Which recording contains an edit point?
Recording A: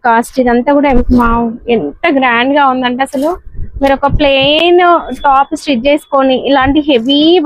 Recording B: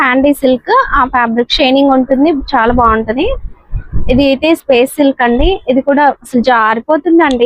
A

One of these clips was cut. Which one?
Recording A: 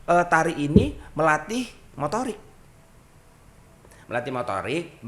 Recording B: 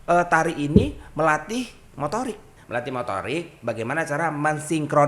B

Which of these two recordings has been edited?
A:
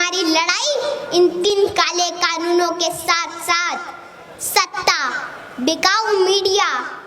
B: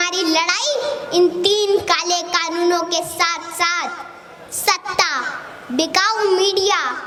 A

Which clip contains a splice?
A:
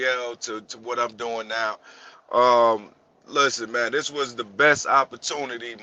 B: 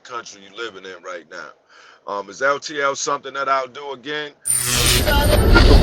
B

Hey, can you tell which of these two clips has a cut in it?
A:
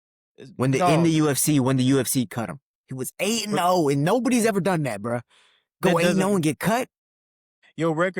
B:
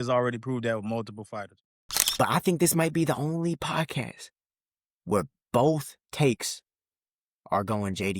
B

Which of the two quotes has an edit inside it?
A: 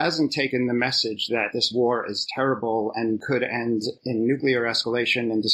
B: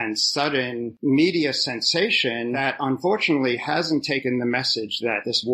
B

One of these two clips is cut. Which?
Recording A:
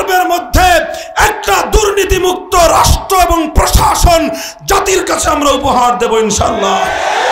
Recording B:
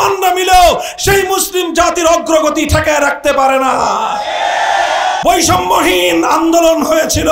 B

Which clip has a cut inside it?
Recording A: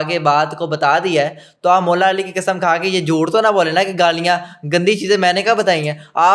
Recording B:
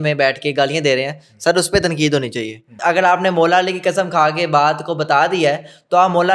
B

